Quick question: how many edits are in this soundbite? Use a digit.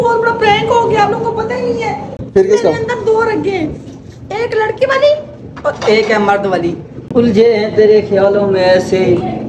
2